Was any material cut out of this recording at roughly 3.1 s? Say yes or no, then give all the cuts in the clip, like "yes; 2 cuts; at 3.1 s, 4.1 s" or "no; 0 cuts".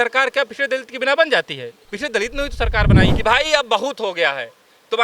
yes; 1 cut; at 3.1 s